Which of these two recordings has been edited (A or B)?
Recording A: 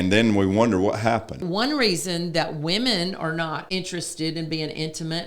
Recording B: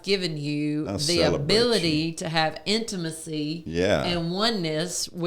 A